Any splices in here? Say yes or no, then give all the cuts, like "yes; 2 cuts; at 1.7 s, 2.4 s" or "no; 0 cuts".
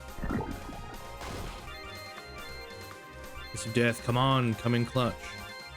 yes; 1 cut; at 1.7 s